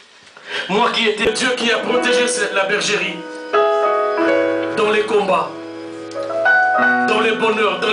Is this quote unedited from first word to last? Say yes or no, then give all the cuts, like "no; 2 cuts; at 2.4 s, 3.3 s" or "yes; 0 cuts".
no; 1 cut; at 1.2 s